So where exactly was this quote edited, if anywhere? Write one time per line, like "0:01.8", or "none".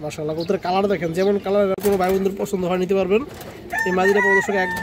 0:01.8